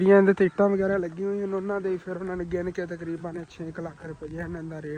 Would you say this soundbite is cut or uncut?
uncut